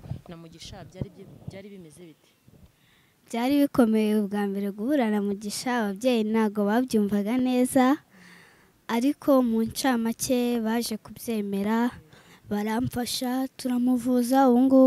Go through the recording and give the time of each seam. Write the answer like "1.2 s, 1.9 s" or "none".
none